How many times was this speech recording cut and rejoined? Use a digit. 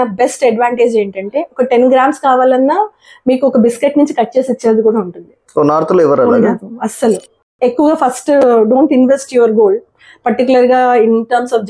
1